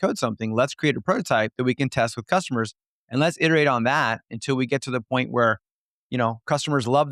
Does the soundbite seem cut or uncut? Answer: uncut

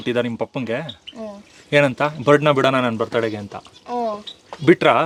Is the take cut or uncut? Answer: uncut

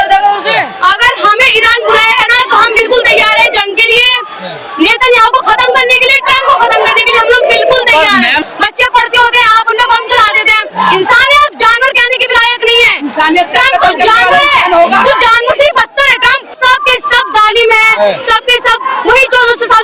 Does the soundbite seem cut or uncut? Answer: cut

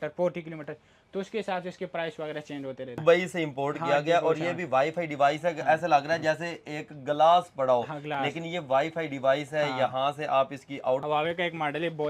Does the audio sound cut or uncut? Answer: cut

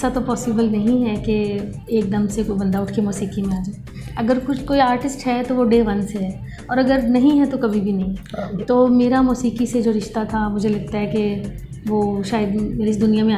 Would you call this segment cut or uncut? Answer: uncut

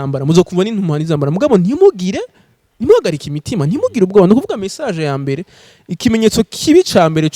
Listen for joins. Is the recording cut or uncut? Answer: uncut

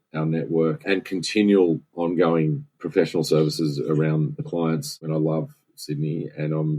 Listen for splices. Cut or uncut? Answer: cut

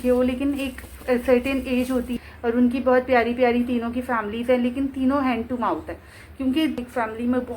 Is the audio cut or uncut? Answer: cut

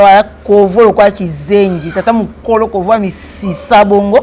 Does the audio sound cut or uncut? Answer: uncut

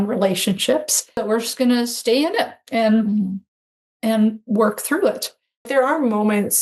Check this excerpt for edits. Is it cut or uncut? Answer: cut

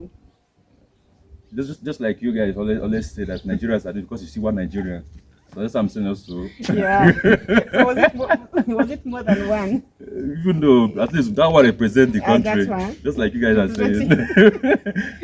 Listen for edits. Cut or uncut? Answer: uncut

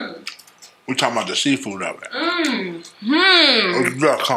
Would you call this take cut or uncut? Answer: uncut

